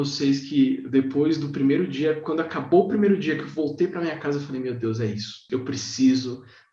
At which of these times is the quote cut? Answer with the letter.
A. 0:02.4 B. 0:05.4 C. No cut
B